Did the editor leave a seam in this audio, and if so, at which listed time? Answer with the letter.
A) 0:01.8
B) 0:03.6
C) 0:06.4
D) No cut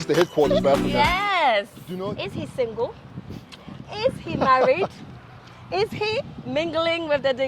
A